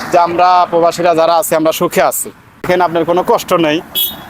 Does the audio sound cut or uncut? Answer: cut